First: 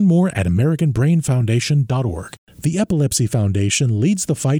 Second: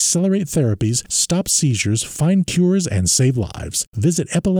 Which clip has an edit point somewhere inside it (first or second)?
first